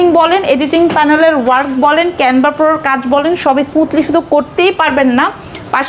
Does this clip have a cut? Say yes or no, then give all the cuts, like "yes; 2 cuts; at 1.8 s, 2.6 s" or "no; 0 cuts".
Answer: no; 0 cuts